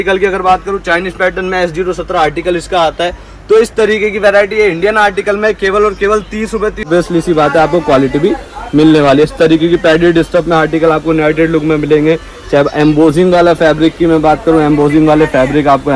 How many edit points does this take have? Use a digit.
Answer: 1